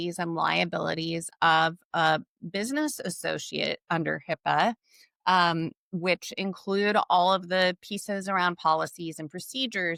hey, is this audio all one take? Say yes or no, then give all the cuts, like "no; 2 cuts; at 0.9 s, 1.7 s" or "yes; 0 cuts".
yes; 0 cuts